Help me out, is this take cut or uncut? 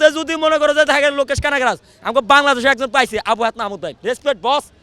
cut